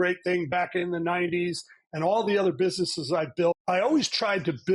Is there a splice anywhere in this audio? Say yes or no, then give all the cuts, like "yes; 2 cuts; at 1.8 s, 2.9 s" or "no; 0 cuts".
yes; 1 cut; at 3.6 s